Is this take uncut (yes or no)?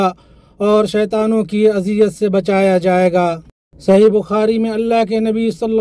yes